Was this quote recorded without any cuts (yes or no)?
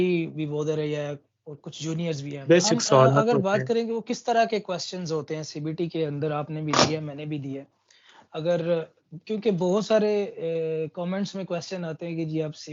no